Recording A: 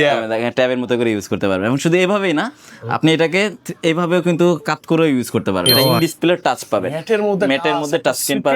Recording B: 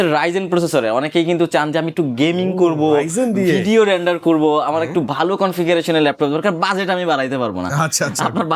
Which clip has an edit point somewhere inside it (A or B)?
A